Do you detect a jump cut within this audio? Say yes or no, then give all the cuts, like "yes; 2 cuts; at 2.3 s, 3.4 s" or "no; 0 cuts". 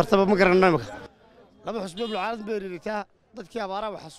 no; 0 cuts